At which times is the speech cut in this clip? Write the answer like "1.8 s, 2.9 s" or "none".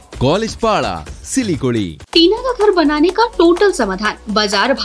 2.0 s